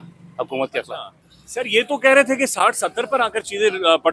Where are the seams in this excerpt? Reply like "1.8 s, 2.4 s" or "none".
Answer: none